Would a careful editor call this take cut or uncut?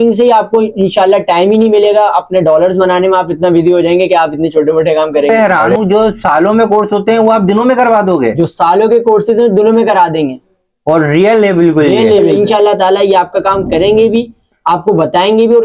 cut